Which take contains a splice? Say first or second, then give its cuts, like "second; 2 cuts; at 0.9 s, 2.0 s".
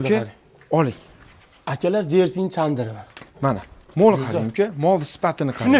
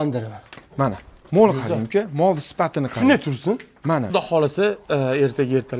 second; 1 cut; at 4.1 s